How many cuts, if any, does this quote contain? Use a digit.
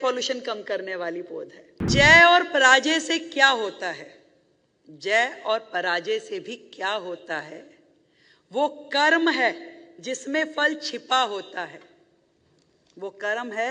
1